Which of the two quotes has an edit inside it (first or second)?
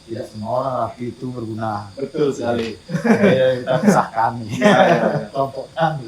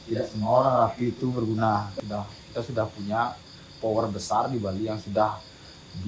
second